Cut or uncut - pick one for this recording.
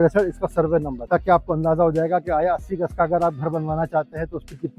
cut